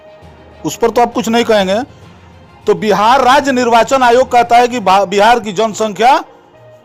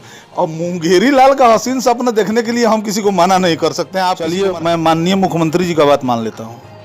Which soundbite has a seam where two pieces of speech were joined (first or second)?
second